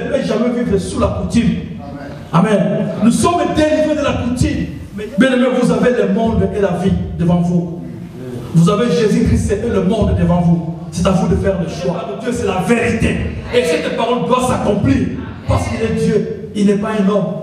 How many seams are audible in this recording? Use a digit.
2